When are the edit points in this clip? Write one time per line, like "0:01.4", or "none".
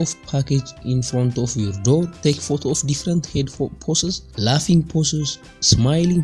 0:02.1
0:04.3